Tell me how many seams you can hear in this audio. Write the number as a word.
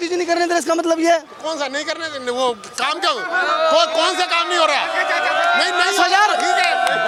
zero